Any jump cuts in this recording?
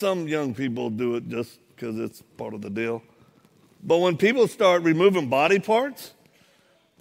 no; 0 cuts

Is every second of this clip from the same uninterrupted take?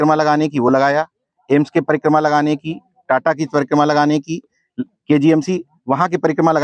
yes; 0 cuts

